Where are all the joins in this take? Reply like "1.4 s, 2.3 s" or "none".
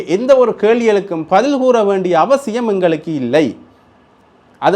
none